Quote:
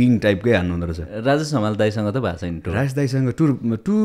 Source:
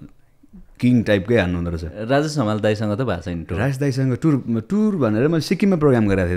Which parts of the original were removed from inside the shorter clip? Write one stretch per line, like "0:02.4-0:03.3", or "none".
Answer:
none